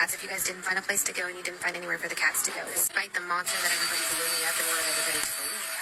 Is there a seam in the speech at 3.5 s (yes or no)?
no